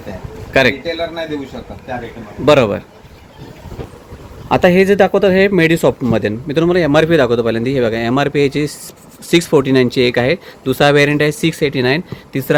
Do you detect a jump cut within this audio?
no; 0 cuts

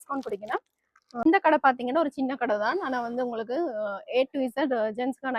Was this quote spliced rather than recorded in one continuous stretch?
yes; 1 cut; at 1.2 s

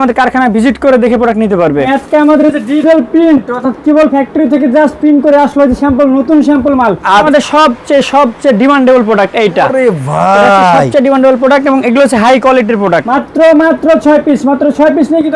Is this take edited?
yes; 3 cuts; at 1.9 s, 7.3 s, 13.0 s

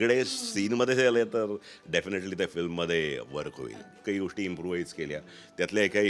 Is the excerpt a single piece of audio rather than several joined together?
no; 1 cut; at 3.9 s

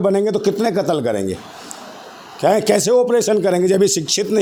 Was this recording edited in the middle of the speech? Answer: no; 0 cuts

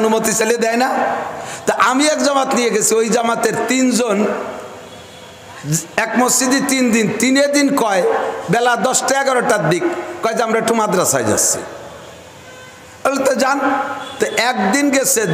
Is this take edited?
no; 0 cuts

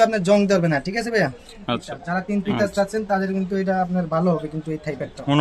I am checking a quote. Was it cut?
yes; 1 cut; at 2.0 s

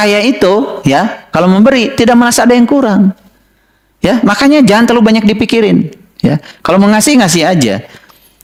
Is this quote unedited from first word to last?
yes; 0 cuts

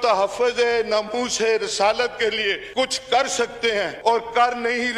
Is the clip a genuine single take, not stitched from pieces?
no; 2 cuts; at 2.6 s, 3.9 s

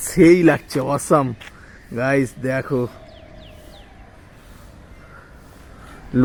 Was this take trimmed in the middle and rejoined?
no; 0 cuts

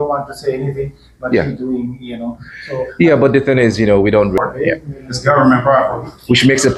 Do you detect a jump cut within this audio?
yes; 1 cut; at 4.4 s

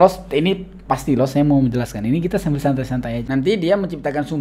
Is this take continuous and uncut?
no; 1 cut; at 3.2 s

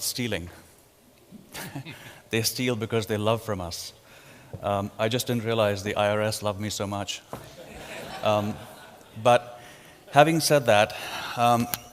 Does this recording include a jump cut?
yes; 1 cut; at 2.5 s

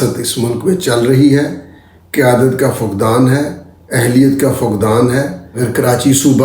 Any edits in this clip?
yes; 1 cut; at 5.4 s

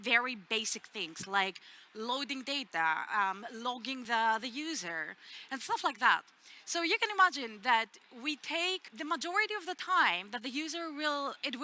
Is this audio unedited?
no; 2 cuts; at 4.0 s, 8.9 s

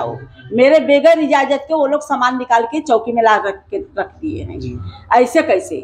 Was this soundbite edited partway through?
no; 0 cuts

